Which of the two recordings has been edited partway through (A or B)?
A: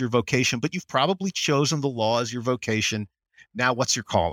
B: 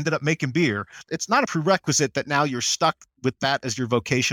B